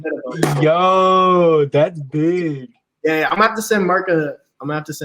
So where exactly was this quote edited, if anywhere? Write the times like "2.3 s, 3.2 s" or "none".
none